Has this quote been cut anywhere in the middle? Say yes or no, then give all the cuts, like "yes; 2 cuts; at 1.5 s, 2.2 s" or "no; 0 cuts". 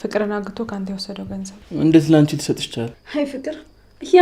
yes; 2 cuts; at 1.6 s, 3.0 s